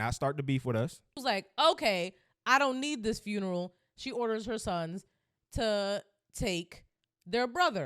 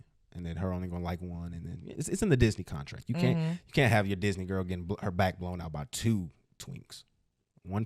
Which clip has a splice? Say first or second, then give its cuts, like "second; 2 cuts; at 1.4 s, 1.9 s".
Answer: first; 1 cut; at 1.2 s